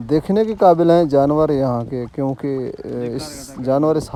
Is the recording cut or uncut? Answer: uncut